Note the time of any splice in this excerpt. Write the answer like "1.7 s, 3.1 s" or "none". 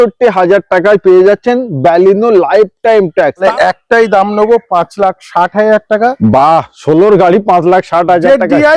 3.4 s